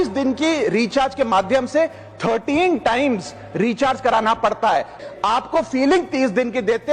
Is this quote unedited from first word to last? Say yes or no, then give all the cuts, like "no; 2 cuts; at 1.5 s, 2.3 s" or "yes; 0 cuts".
no; 1 cut; at 5.0 s